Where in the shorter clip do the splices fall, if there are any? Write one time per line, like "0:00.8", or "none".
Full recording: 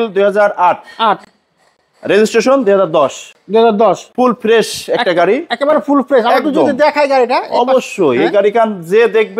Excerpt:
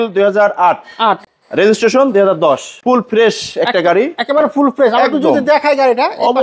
0:01.3
0:02.7